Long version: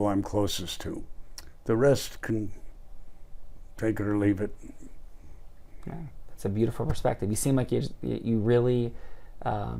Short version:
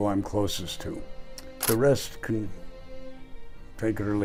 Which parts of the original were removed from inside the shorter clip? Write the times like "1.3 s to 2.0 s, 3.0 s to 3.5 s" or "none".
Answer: none